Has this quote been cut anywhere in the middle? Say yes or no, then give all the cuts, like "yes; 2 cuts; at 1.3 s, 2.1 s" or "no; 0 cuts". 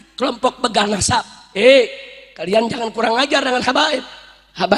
no; 0 cuts